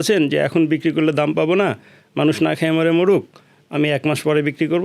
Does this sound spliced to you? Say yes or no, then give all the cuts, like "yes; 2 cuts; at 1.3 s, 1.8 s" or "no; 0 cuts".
no; 0 cuts